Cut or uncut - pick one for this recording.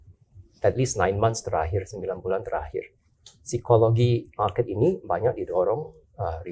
uncut